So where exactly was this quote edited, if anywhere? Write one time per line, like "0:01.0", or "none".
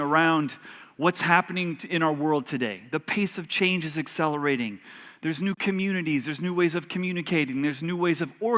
0:05.6